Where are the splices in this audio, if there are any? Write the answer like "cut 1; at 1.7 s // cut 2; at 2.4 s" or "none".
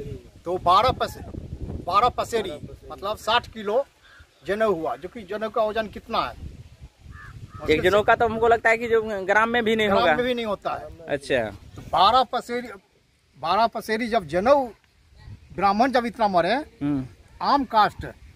none